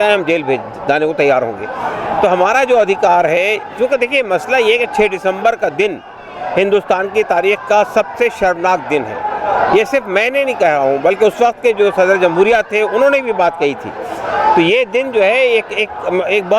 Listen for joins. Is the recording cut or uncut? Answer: uncut